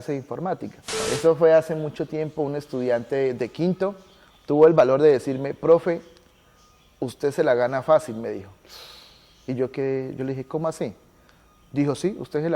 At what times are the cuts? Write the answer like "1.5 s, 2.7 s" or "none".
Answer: 1.1 s